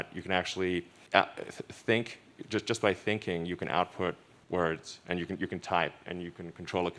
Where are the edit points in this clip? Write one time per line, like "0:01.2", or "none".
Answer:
0:01.0
0:04.3